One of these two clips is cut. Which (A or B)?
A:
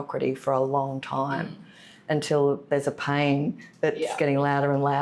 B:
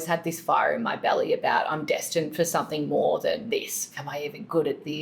B